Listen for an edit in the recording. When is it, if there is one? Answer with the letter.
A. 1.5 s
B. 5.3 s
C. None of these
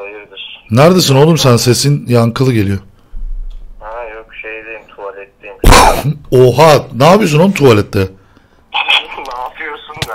C